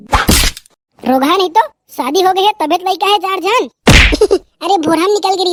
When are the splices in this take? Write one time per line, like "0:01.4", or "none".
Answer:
none